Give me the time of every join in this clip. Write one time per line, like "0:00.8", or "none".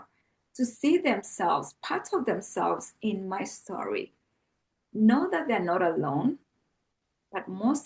none